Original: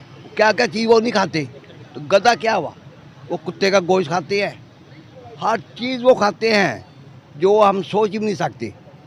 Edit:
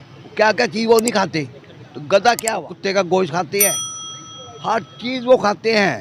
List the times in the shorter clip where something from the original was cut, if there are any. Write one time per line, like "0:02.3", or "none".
0:02.7